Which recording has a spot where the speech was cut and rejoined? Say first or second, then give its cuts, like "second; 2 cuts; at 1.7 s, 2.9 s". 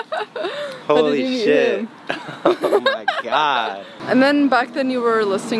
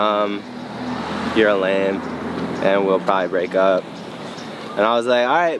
first; 1 cut; at 3.9 s